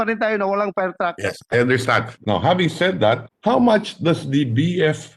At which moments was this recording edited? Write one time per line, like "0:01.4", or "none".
0:02.1
0:03.3